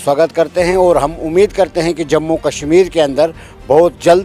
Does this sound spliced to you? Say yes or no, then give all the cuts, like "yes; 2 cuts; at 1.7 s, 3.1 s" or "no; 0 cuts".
no; 0 cuts